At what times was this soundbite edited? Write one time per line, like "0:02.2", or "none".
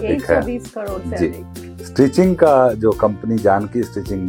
none

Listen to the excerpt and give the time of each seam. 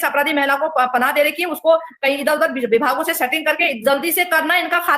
0:03.8

